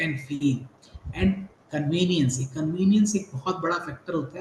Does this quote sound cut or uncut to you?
uncut